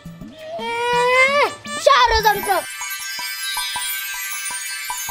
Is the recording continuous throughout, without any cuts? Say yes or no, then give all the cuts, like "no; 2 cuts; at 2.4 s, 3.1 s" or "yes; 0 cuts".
no; 1 cut; at 2.7 s